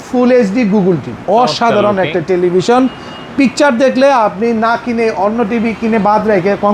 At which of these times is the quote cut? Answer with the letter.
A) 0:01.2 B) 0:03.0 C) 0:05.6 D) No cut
A